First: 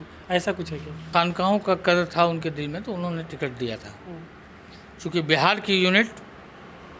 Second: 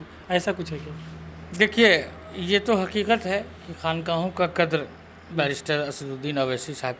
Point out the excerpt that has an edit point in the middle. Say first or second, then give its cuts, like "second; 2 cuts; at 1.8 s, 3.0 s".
first; 1 cut; at 1.1 s